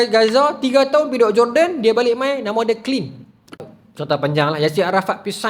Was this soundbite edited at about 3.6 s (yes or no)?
yes